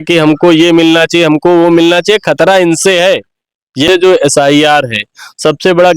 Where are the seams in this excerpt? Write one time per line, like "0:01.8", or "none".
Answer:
0:03.9